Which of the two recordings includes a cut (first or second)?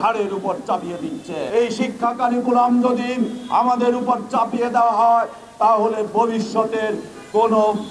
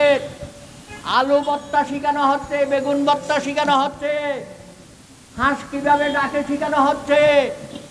first